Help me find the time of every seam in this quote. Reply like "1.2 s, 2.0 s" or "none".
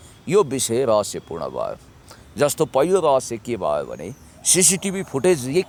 none